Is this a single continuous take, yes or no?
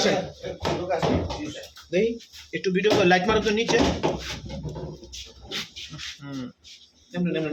yes